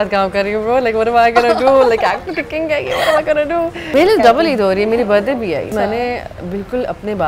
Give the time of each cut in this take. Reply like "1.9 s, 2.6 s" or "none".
3.9 s, 5.7 s